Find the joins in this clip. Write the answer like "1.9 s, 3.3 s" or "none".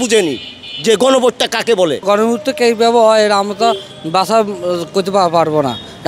2.0 s